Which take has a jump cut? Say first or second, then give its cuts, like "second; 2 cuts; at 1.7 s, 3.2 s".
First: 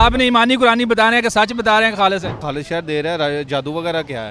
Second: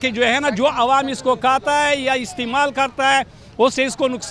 first; 1 cut; at 2.4 s